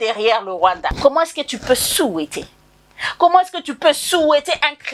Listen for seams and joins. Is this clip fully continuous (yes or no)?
no